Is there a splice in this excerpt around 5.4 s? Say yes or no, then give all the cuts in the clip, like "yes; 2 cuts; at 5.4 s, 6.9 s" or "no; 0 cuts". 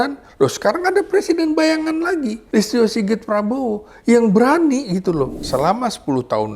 yes; 2 cuts; at 2.4 s, 5.4 s